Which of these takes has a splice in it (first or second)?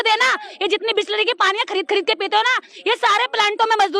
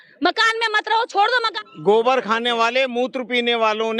second